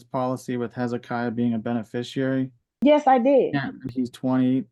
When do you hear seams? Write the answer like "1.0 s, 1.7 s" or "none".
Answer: none